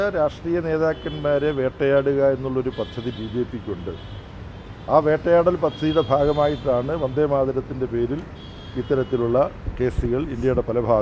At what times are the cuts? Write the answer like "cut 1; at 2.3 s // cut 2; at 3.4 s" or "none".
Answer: none